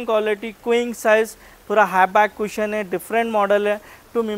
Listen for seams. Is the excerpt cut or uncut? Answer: uncut